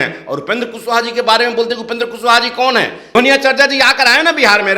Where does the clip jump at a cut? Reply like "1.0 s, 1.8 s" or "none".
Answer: 3.2 s